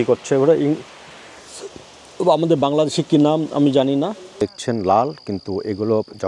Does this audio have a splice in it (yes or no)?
yes